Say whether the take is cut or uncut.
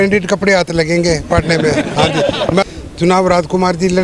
cut